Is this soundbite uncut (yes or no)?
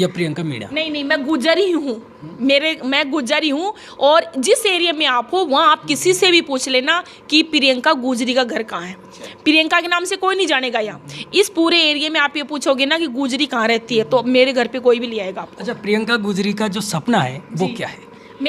yes